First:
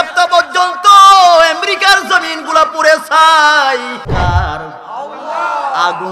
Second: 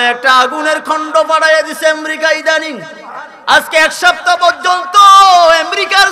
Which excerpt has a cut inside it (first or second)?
first